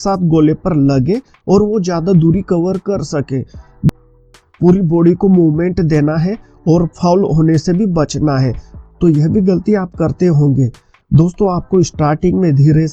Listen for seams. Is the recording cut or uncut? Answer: cut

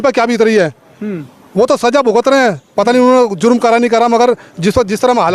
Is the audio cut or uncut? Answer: uncut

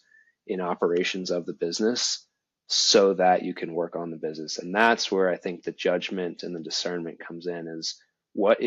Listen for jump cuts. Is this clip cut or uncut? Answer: uncut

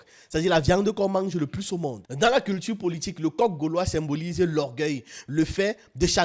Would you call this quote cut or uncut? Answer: cut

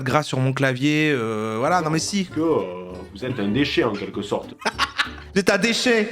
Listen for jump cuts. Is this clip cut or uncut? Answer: cut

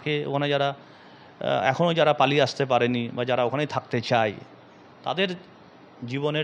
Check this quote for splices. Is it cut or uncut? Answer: uncut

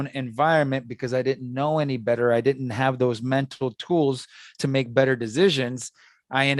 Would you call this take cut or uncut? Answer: uncut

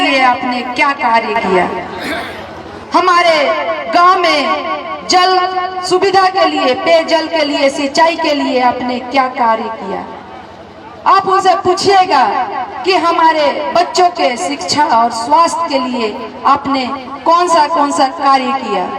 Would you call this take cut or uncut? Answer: uncut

